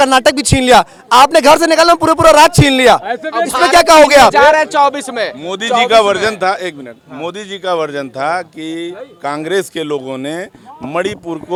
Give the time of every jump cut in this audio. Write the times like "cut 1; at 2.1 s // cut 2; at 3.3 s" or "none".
none